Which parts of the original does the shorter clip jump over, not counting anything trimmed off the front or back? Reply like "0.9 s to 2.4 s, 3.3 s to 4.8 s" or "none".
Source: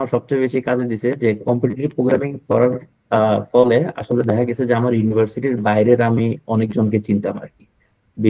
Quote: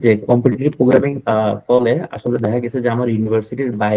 2.3 s to 3.0 s